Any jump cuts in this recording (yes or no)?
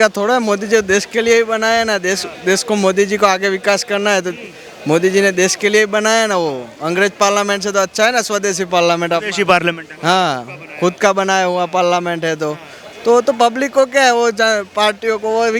no